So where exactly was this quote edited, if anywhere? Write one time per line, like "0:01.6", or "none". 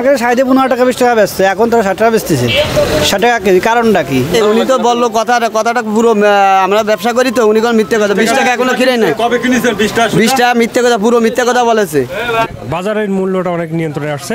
0:04.3
0:12.1